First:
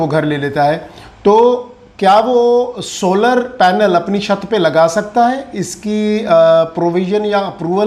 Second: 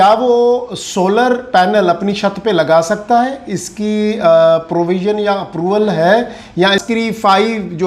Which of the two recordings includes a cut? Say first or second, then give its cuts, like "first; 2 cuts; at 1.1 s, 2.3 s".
second; 1 cut; at 6.8 s